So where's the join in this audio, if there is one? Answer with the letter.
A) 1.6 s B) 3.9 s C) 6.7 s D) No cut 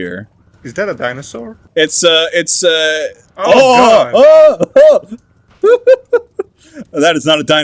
A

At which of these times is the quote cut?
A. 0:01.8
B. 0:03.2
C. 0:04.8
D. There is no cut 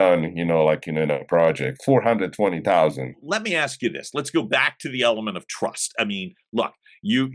B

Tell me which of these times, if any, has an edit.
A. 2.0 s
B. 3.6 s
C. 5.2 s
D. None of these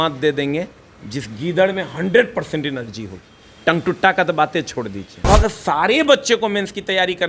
C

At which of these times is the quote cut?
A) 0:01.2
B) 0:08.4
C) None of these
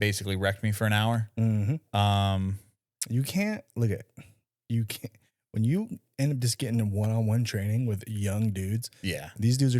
C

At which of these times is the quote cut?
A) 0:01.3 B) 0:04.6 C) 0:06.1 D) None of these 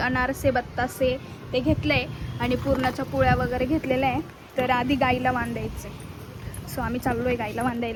D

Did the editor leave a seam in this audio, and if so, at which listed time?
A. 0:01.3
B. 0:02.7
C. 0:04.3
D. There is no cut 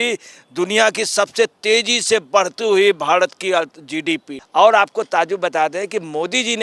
C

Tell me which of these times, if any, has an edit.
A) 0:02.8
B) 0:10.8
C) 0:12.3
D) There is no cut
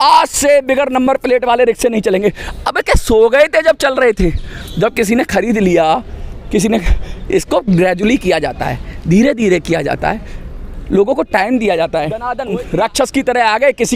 C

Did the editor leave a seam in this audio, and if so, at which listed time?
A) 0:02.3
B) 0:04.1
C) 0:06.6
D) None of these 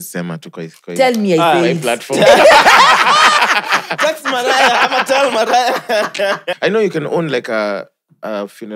C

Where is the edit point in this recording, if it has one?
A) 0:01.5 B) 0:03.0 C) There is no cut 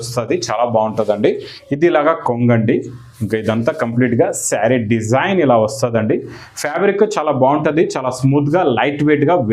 A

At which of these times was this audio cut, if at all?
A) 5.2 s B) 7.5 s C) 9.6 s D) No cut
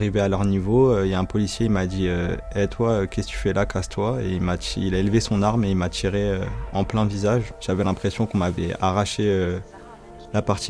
B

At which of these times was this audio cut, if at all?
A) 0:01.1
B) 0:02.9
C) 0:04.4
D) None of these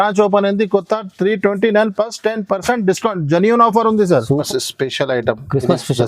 C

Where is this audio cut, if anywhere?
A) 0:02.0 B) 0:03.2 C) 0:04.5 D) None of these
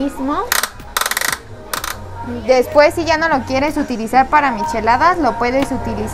A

